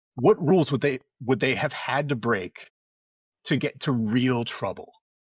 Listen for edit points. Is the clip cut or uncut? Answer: uncut